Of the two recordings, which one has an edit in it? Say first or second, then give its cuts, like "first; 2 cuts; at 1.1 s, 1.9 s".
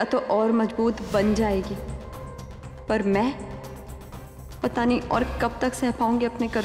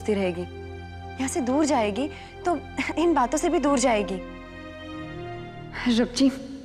second; 1 cut; at 5.1 s